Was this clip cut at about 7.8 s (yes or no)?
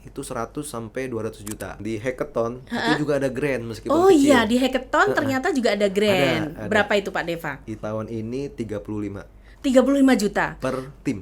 yes